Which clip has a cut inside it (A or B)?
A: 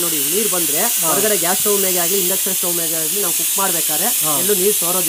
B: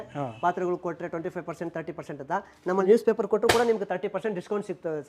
B